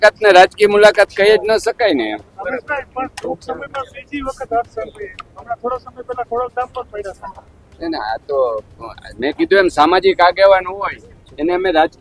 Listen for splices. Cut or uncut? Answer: uncut